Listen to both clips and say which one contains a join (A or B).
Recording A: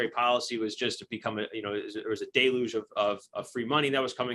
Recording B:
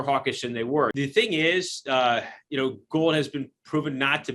B